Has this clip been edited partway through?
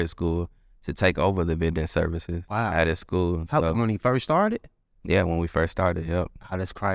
yes; 1 cut; at 2.3 s

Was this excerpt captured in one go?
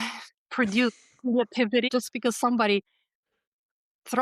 no; 1 cut; at 1.9 s

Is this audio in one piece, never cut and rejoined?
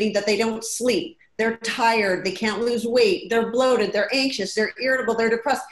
yes; 0 cuts

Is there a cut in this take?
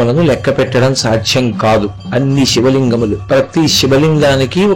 yes; 2 cuts; at 2.0 s, 3.2 s

